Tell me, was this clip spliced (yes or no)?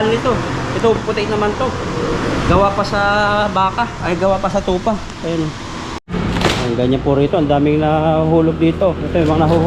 yes